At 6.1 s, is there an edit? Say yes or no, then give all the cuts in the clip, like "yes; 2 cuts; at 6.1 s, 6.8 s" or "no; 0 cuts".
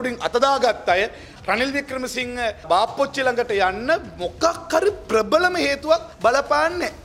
yes; 3 cuts; at 1.3 s, 2.7 s, 6.1 s